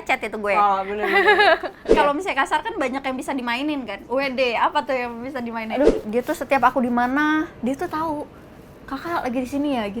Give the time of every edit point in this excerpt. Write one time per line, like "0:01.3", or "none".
0:01.8
0:06.0